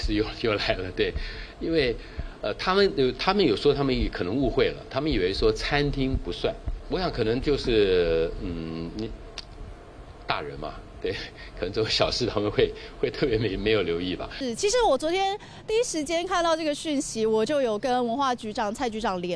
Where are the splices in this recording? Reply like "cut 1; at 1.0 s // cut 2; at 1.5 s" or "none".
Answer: cut 1; at 6.7 s // cut 2; at 14.3 s